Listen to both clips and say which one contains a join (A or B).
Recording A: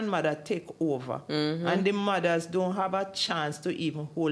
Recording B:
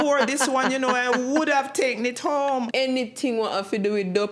B